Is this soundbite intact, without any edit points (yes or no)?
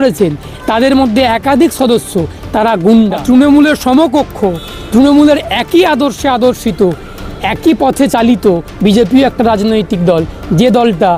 no